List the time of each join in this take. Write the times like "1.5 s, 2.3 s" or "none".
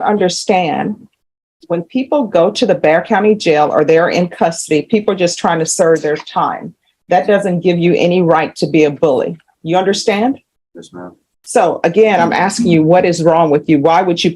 none